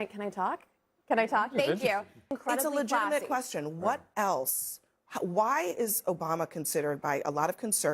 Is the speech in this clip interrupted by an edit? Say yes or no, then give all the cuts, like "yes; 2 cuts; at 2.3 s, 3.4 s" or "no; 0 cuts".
yes; 1 cut; at 2.3 s